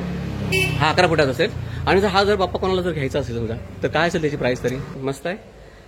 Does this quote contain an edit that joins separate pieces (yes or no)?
yes